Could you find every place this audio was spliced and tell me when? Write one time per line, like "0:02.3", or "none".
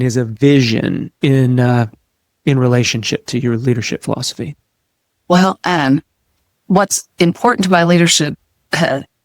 0:01.1